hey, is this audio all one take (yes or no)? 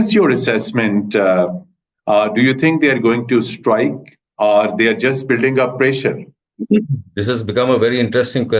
yes